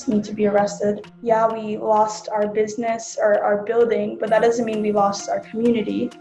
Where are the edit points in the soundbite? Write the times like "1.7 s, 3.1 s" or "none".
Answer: 1.0 s